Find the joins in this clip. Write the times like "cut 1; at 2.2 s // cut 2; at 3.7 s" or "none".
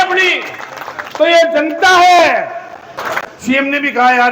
cut 1; at 3.0 s

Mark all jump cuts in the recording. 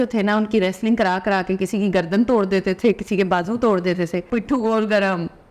cut 1; at 4.2 s

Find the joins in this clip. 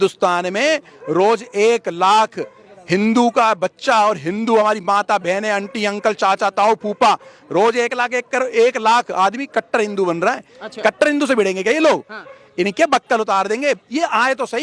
none

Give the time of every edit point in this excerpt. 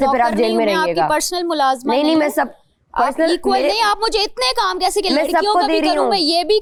none

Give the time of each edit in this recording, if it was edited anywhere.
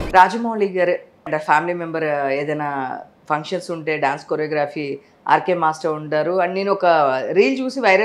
cut 1; at 1.3 s

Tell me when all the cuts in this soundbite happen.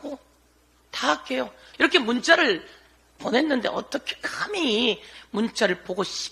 cut 1; at 1.6 s // cut 2; at 5.1 s

